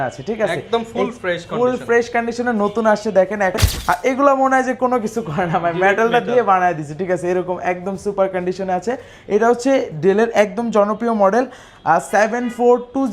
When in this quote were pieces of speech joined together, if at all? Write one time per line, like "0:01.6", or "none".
0:03.6